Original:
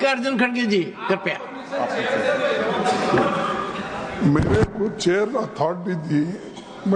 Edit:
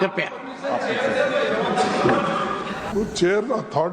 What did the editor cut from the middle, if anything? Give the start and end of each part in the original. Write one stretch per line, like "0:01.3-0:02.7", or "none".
0:04.0-0:04.7